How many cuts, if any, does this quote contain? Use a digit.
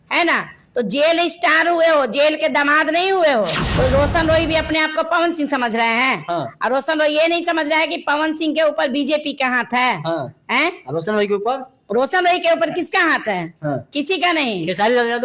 1